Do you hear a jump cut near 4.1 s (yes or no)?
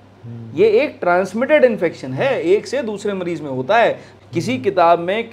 yes